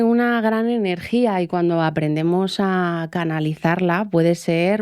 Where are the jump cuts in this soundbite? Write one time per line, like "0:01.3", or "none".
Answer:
none